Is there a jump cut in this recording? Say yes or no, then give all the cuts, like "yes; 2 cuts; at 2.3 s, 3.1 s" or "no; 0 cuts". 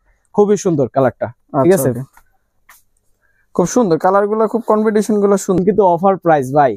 yes; 1 cut; at 5.6 s